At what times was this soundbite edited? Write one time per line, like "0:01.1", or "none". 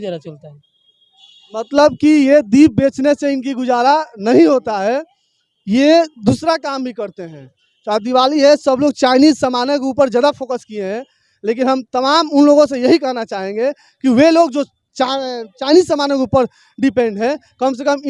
none